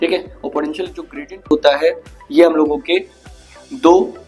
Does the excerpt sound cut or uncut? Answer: uncut